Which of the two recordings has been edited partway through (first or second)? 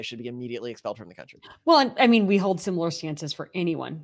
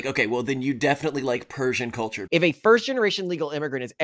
second